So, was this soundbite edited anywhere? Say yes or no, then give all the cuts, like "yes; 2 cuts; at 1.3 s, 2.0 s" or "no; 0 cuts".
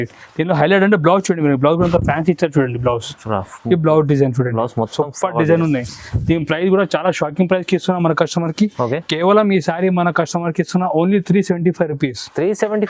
no; 0 cuts